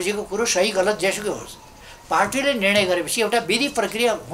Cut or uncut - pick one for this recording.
uncut